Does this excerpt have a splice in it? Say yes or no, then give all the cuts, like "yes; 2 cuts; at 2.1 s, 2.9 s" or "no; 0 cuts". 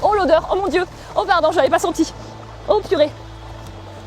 no; 0 cuts